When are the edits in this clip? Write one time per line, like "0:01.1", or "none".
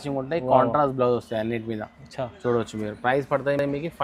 none